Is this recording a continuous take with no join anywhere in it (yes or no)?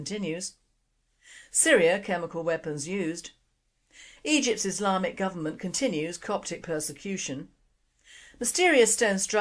no